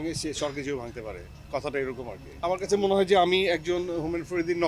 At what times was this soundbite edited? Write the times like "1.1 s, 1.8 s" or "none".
2.3 s